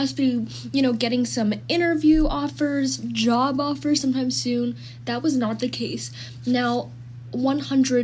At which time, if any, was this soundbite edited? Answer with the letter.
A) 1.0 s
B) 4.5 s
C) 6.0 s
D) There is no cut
D